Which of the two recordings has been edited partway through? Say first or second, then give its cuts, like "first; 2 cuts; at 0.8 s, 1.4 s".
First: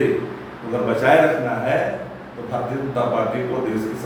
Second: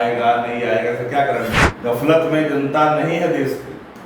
second; 1 cut; at 1.7 s